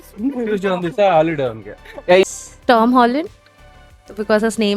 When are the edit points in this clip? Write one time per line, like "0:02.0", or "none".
0:02.2